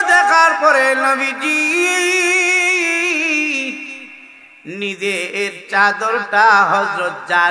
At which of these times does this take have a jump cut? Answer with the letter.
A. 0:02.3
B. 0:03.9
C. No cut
C